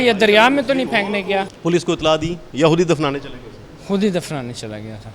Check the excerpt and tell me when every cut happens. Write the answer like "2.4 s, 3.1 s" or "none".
1.5 s